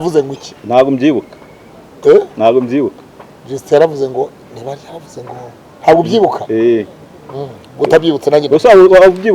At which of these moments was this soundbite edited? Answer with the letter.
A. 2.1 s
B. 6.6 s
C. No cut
C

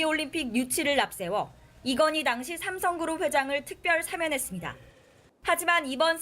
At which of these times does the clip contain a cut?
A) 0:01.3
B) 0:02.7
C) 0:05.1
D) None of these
B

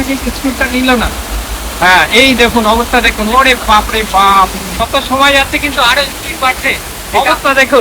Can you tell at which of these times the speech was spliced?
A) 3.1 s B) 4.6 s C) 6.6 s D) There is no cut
B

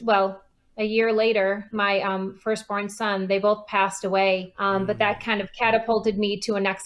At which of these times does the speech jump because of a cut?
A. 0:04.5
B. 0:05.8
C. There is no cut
A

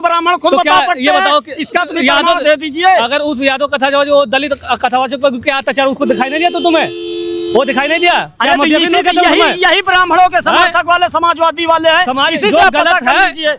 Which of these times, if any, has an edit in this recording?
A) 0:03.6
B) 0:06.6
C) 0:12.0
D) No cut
D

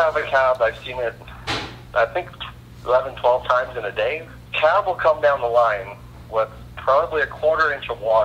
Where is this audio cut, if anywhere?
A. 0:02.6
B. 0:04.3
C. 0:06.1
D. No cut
B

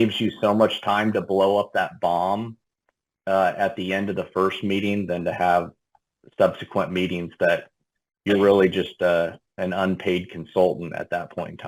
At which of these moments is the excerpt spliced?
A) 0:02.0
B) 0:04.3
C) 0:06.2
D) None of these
D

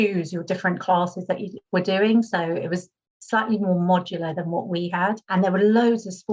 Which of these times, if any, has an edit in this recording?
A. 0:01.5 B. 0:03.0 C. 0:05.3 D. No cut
A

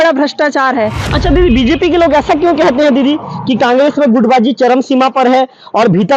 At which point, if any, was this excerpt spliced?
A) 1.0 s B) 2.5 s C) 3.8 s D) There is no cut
A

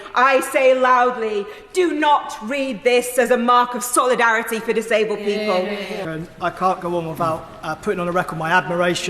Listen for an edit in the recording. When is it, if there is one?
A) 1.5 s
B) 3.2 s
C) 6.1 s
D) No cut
C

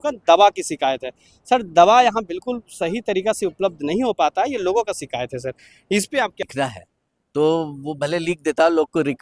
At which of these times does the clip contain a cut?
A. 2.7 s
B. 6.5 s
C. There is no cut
B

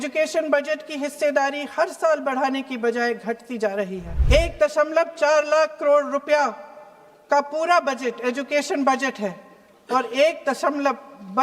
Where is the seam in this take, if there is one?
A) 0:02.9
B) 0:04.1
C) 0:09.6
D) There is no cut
B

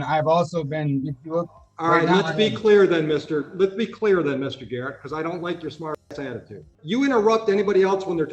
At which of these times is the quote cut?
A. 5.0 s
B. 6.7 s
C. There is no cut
B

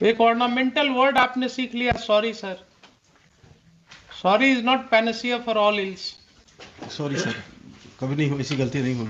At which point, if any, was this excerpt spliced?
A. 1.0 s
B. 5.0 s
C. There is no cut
C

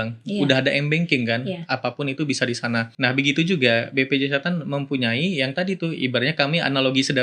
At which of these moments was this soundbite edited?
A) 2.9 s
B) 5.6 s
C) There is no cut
A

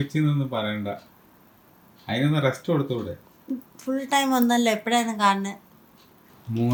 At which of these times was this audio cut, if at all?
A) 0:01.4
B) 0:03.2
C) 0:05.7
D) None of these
D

